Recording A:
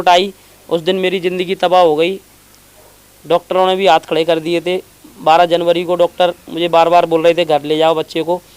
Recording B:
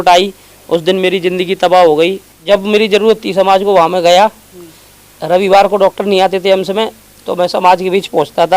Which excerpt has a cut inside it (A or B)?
B